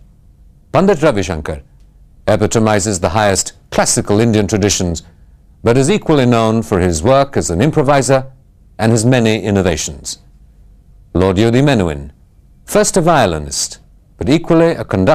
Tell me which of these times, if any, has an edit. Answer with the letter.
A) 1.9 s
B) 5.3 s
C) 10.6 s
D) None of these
D